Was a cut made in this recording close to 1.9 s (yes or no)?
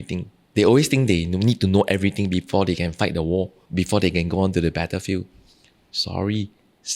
no